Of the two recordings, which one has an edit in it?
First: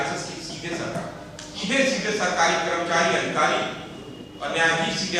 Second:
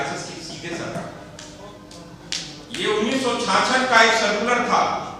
first; 1 cut; at 1.5 s

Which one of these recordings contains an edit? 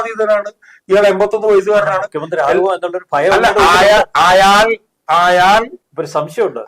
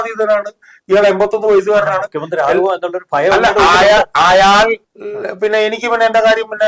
second; 1 cut; at 4.9 s

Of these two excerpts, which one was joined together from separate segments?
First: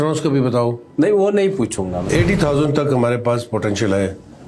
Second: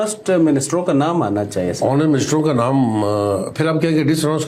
first; 1 cut; at 2.0 s

